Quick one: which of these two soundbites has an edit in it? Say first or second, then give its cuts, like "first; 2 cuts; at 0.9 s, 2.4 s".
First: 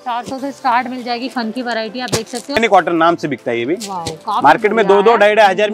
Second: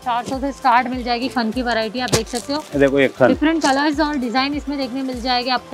first; 1 cut; at 2.6 s